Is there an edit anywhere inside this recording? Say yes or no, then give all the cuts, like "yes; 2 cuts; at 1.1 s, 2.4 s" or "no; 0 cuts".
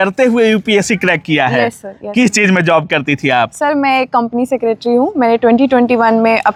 no; 0 cuts